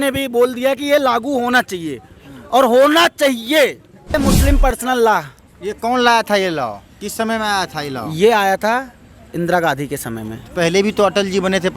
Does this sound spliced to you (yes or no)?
yes